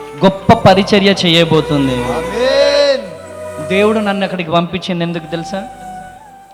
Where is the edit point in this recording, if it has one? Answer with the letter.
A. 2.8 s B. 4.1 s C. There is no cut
C